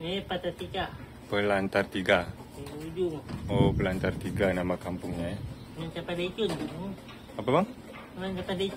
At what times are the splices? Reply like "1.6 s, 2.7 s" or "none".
none